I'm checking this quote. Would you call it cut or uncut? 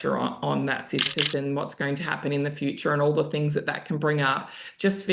cut